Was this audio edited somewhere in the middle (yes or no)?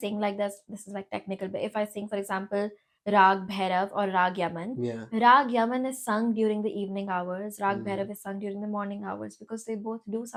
no